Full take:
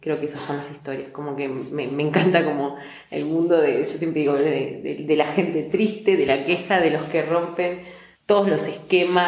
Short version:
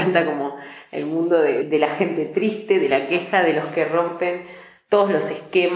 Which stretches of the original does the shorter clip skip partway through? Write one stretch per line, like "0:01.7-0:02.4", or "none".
0:03.8-0:05.0